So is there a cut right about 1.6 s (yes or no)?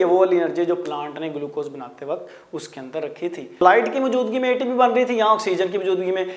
no